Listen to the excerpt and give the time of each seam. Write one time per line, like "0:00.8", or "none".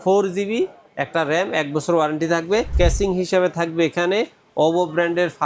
0:02.7